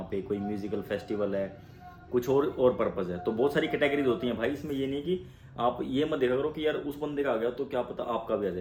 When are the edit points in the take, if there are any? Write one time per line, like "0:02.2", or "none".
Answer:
none